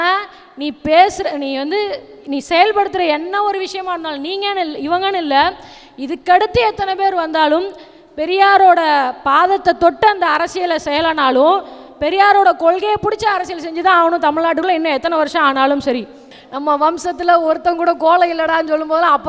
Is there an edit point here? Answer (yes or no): yes